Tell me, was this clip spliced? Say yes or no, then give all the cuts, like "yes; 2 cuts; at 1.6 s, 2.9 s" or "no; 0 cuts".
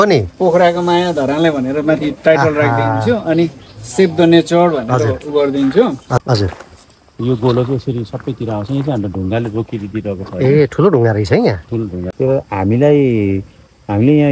yes; 2 cuts; at 6.2 s, 12.0 s